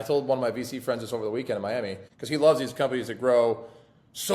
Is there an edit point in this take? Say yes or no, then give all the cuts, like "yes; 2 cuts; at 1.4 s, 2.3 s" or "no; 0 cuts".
yes; 1 cut; at 2.1 s